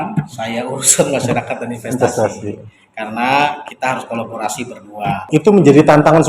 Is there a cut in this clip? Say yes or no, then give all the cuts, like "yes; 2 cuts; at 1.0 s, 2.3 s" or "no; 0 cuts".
yes; 1 cut; at 5.2 s